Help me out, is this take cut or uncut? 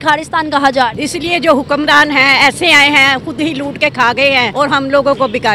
cut